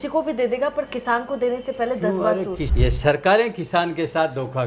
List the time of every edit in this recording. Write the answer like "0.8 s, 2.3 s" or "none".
2.7 s